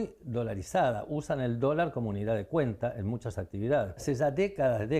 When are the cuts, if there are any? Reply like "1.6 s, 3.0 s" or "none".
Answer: 4.0 s